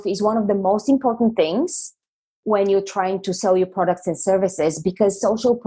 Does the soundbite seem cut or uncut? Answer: uncut